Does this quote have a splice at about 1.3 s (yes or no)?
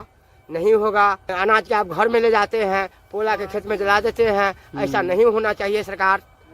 yes